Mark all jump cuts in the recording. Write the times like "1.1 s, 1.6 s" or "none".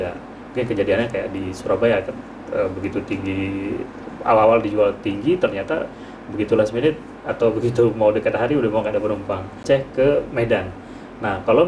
9.5 s